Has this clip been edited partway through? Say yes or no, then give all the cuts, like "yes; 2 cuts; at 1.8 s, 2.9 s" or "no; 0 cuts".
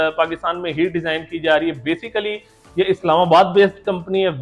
no; 0 cuts